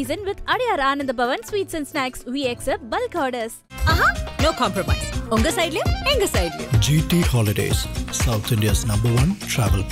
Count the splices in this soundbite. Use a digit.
0